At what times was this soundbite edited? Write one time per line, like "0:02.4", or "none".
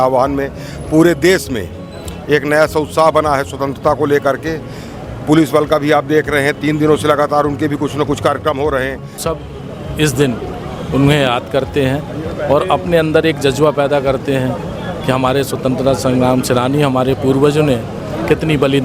0:09.2